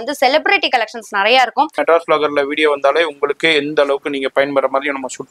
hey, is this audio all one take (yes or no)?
no